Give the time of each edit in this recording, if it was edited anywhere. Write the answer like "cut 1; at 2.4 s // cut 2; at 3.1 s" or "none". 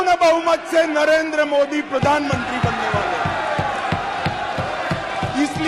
none